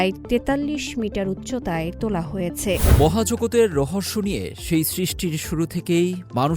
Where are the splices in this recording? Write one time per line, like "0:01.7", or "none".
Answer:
0:02.9

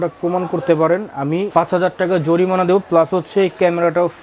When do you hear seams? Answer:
none

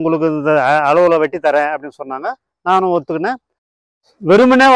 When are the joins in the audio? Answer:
0:03.8

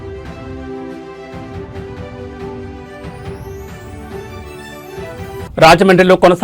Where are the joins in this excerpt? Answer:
none

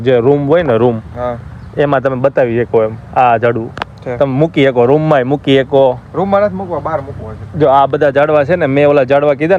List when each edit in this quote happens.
none

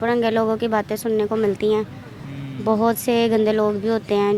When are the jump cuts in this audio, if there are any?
none

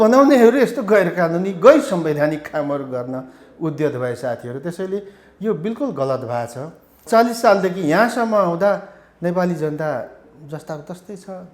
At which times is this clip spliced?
0:07.0

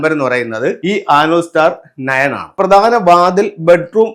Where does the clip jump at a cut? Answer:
0:00.8
0:02.5

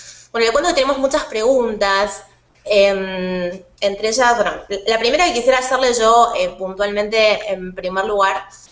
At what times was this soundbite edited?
none

